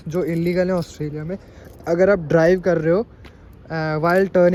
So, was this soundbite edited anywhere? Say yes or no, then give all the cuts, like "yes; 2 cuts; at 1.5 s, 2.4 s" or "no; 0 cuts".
no; 0 cuts